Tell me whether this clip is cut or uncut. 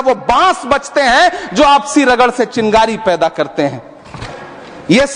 cut